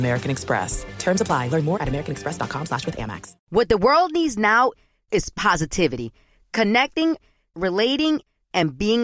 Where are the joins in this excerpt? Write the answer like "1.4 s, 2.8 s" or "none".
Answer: 3.3 s